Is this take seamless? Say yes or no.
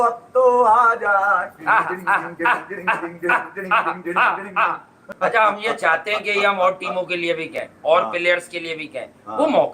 no